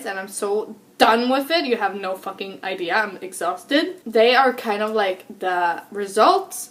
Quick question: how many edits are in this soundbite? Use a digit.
1